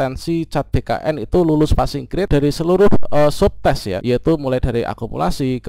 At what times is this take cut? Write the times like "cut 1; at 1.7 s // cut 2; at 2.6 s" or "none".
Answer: cut 1; at 2.3 s // cut 2; at 3.9 s